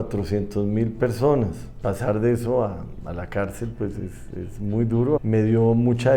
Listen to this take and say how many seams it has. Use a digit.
2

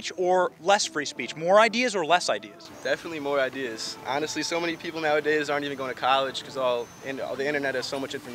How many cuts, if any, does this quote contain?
0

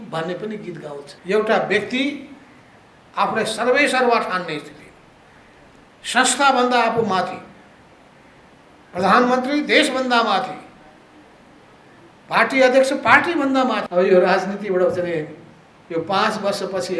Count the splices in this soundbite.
2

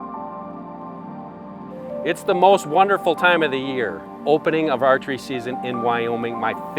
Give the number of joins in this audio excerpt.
2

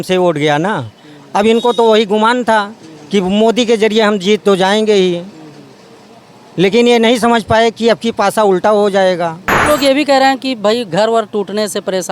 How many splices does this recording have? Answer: 1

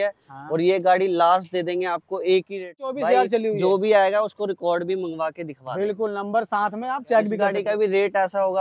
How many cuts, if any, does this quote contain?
2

